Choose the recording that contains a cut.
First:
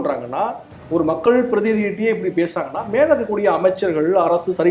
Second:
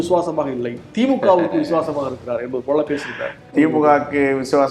second; 1 cut; at 3.5 s

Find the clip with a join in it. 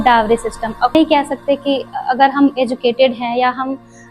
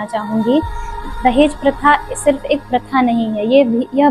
first; 1 cut; at 0.9 s

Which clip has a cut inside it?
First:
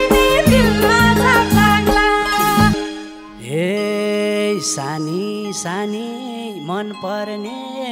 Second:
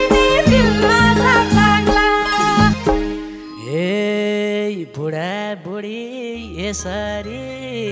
first; 1 cut; at 2.8 s

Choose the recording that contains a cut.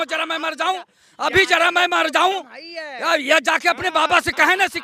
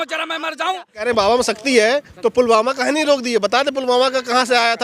second; 1 cut; at 1.0 s

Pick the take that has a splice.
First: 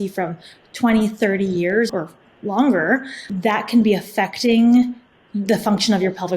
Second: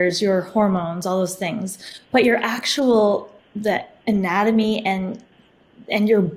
first; 2 cuts; at 1.9 s, 3.2 s

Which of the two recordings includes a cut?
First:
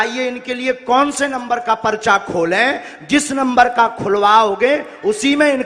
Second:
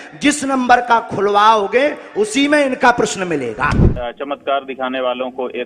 second; 1 cut; at 3.9 s

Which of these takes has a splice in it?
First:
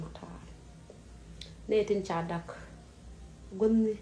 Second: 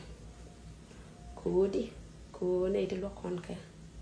first; 1 cut; at 1.6 s

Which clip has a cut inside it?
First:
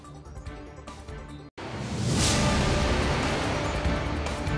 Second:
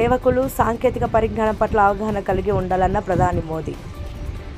first; 1 cut; at 1.5 s

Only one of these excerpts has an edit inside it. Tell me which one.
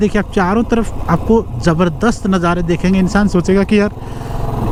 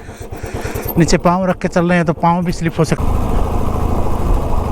second; 1 cut; at 3.0 s

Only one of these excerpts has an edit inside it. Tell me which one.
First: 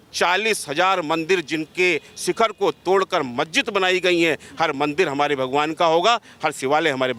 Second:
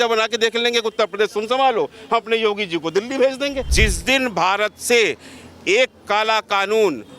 second; 1 cut; at 3.7 s

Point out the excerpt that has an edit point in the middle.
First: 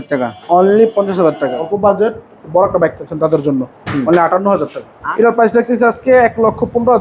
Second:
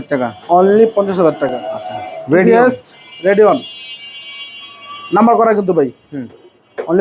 first; 2 cuts; at 1.5 s, 4.9 s

